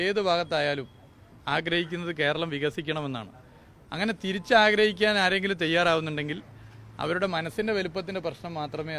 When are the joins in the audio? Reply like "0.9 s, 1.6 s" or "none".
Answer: none

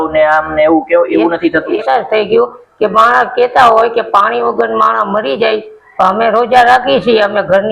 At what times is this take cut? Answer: 1.8 s

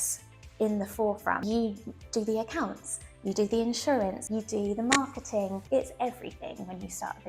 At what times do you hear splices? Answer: 1.4 s, 4.2 s, 5.6 s

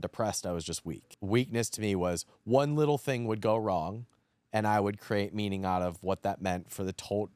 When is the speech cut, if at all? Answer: 1.1 s

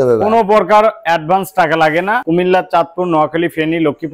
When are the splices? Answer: 2.2 s

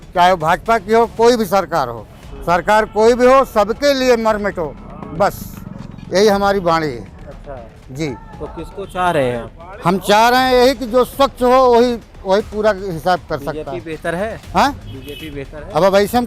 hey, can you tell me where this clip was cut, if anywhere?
none

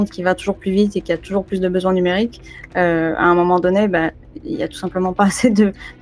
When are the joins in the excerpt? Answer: none

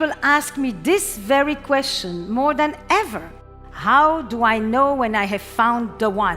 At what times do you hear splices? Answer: 3.5 s

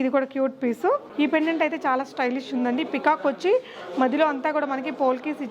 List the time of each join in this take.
1.1 s

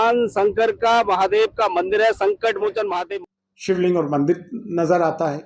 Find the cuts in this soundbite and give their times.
3.1 s

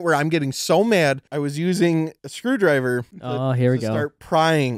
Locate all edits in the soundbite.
1.2 s, 2.2 s, 3.2 s

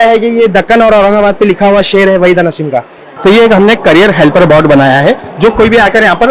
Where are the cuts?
3.1 s

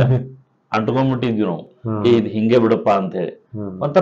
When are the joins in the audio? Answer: none

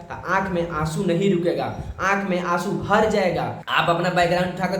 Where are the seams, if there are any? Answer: 3.6 s

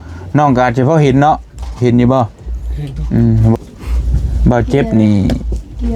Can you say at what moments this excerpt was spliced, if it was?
3.6 s

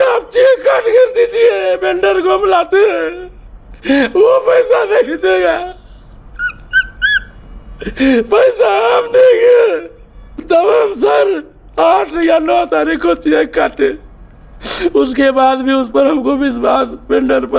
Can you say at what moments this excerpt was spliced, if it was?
10.4 s

